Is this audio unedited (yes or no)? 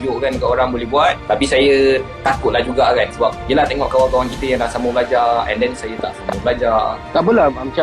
no